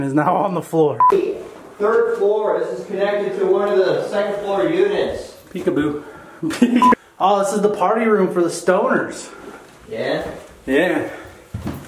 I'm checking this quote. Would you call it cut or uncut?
cut